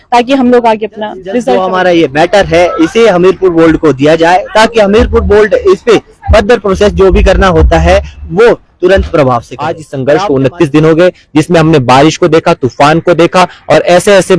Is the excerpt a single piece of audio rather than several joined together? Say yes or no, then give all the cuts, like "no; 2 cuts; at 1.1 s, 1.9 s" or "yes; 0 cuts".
no; 2 cuts; at 1.6 s, 9.9 s